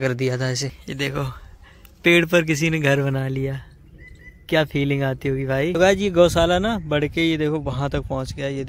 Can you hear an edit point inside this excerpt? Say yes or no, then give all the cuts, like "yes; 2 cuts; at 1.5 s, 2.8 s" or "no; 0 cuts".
yes; 2 cuts; at 0.8 s, 5.7 s